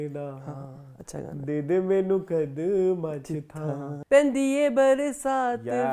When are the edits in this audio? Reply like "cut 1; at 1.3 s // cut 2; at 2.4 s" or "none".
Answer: cut 1; at 1.3 s // cut 2; at 3.9 s